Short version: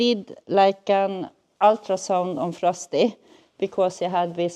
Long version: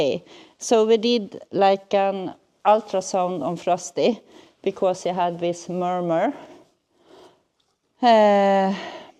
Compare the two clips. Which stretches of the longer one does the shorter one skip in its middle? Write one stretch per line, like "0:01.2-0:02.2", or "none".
none